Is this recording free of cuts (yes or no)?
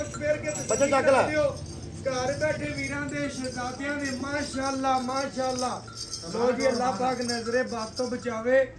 yes